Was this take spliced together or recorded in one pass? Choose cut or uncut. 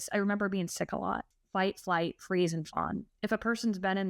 cut